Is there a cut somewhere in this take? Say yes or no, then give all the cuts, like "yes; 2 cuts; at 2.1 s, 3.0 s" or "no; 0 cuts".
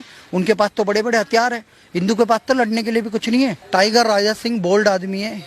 yes; 1 cut; at 3.6 s